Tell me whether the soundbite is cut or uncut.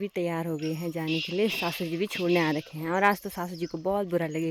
uncut